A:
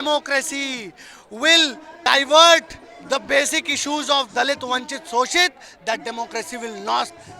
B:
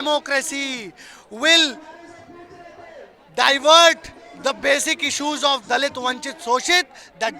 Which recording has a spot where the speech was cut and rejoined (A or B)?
A